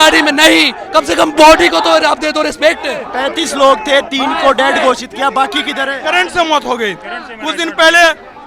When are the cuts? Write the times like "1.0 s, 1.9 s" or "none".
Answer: 3.1 s, 5.9 s

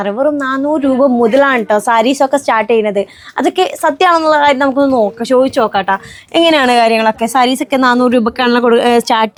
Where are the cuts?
none

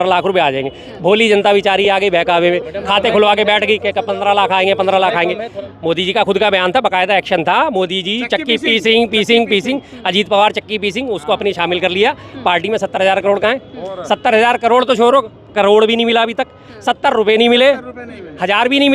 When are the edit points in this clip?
5.5 s

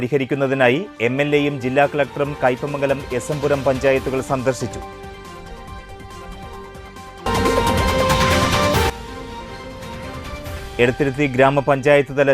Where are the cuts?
10.7 s

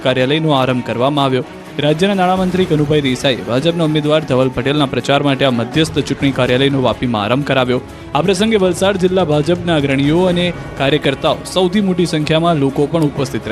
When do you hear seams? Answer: 2.7 s

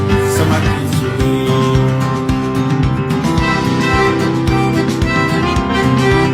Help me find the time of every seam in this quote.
none

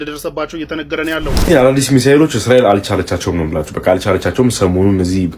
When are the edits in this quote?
1.4 s

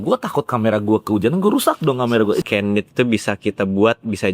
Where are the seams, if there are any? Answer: 2.4 s

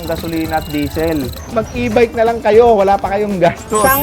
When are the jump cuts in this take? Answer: 1.4 s

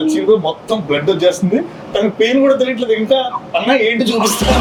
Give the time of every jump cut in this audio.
none

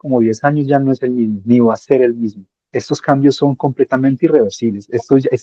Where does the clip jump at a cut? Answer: none

